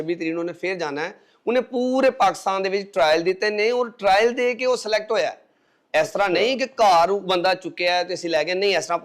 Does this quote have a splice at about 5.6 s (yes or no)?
no